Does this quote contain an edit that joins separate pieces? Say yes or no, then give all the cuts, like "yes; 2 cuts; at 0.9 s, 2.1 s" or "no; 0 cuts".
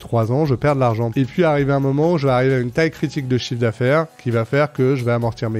yes; 1 cut; at 1.1 s